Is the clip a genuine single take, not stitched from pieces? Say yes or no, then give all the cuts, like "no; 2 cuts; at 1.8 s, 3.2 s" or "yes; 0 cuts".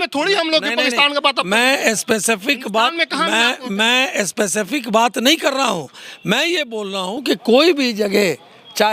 yes; 0 cuts